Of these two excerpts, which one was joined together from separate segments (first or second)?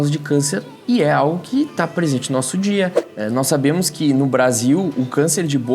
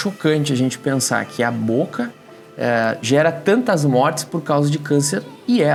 first